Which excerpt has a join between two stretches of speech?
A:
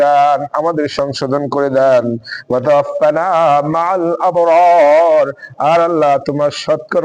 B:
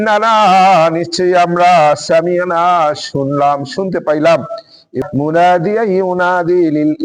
B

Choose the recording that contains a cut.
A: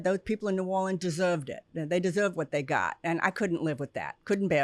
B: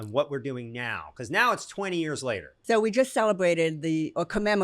B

